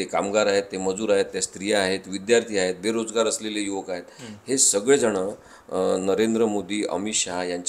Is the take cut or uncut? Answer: uncut